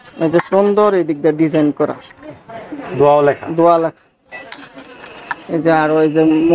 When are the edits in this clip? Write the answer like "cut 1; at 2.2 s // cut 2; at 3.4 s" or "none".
none